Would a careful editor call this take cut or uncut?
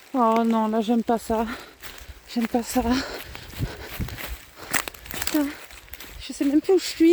uncut